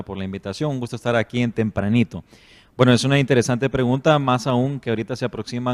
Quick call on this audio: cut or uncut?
cut